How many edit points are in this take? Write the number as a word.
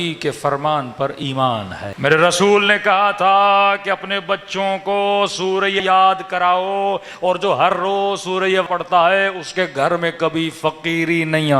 three